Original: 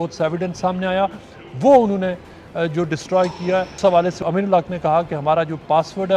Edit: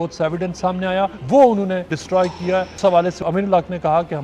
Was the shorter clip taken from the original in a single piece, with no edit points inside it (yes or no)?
no